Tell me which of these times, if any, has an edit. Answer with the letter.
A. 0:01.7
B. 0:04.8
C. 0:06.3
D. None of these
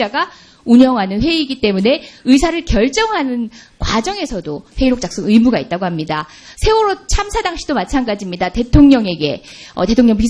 A